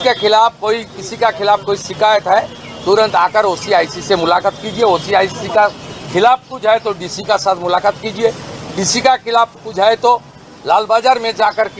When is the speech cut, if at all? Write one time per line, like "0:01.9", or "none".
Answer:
none